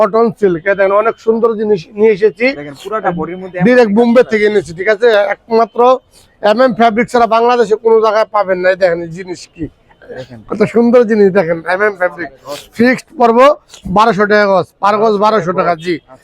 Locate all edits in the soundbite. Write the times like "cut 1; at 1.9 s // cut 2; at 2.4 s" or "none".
none